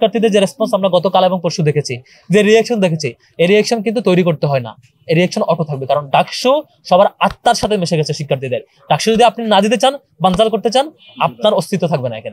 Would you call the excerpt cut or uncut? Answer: uncut